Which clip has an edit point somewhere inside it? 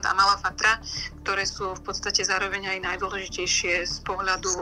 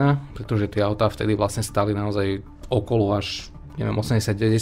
second; 1 cut; at 2.5 s

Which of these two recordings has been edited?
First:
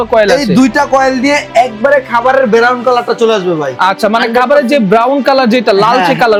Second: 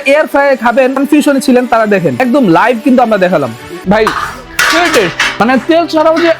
second; 4 cuts; at 1.0 s, 2.2 s, 3.6 s, 5.2 s

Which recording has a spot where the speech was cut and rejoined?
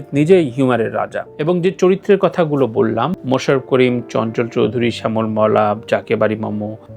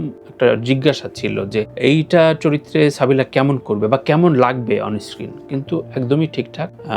first; 1 cut; at 1.3 s

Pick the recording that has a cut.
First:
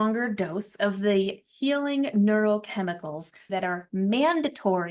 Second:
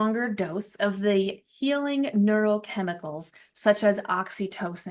first; 1 cut; at 3.5 s

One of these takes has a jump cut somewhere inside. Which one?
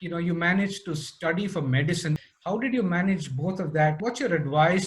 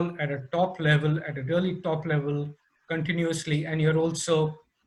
first; 2 cuts; at 2.2 s, 4.0 s

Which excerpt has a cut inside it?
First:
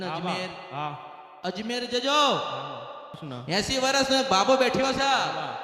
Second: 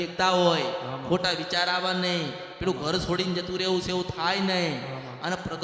first; 1 cut; at 3.3 s

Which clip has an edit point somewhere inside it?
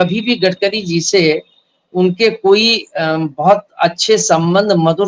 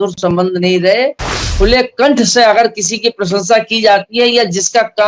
second; 1 cut; at 1.5 s

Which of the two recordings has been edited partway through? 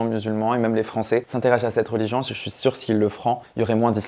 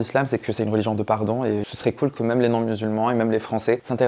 second; 1 cut; at 1.7 s

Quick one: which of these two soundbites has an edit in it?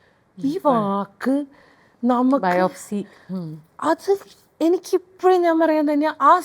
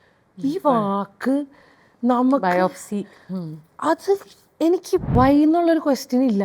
second; 1 cut; at 5.1 s

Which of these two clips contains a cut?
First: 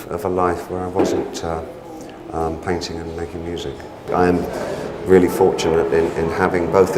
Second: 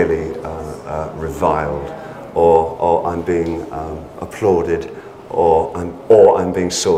first; 1 cut; at 4.1 s

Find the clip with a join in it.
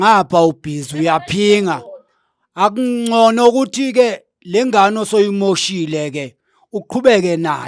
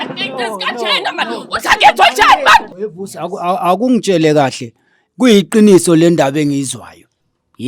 second; 1 cut; at 2.8 s

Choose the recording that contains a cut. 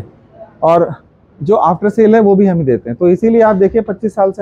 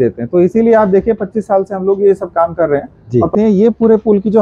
second; 1 cut; at 3.3 s

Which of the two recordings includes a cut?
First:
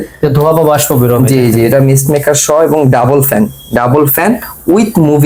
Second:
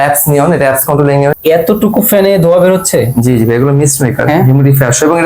second; 1 cut; at 1.3 s

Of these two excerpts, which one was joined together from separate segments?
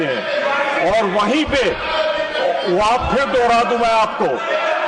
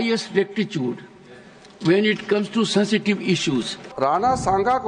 second; 1 cut; at 3.8 s

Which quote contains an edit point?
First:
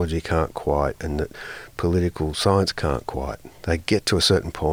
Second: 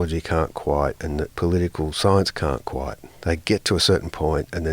second; 1 cut; at 1.3 s

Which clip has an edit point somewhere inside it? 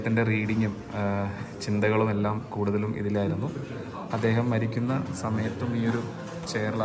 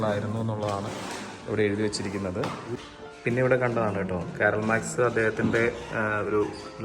second; 1 cut; at 2.7 s

